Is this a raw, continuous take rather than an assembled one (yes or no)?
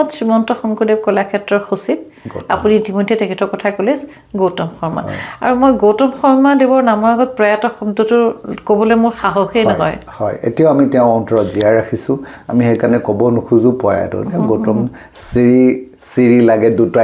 yes